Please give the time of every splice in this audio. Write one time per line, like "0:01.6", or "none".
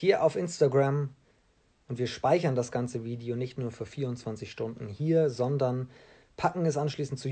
none